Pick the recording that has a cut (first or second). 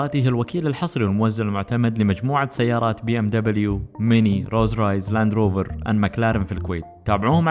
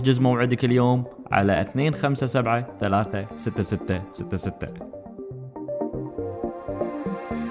second